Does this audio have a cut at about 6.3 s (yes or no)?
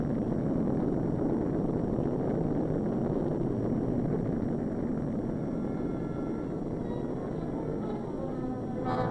no